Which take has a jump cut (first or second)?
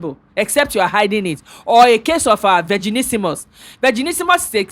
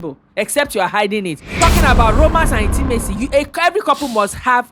second